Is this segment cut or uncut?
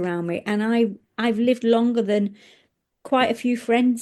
uncut